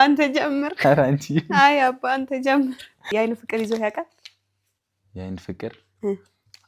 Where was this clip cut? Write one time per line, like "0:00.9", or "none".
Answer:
0:03.1